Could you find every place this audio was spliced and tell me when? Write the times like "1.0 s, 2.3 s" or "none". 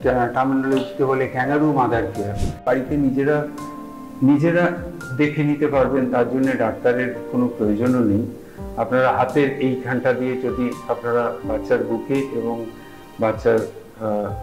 2.6 s